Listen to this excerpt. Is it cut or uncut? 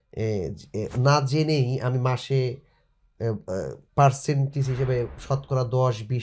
uncut